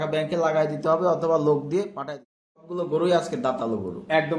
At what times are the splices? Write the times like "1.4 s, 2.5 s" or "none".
2.5 s